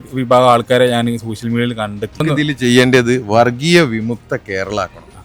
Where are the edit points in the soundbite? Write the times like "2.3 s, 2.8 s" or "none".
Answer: 2.2 s